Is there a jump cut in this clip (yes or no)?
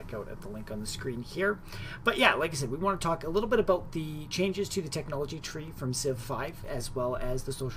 yes